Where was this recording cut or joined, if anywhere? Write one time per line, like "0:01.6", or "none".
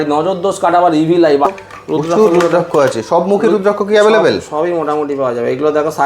0:01.5